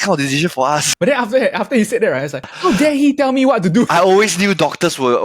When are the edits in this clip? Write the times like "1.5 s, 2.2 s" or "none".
0.9 s, 2.5 s, 3.9 s